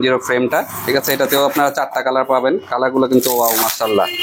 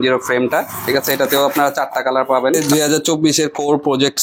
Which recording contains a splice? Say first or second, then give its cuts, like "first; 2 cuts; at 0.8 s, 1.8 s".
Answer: second; 1 cut; at 2.6 s